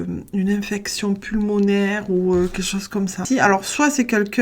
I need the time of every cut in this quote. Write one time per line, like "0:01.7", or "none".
0:03.2

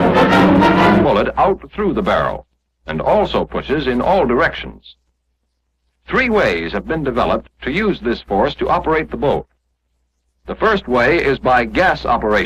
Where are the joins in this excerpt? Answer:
none

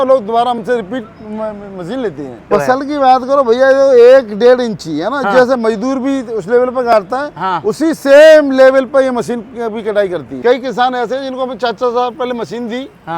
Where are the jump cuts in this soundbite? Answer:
0:02.4
0:10.3

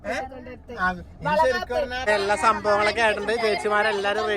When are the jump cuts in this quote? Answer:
0:02.0

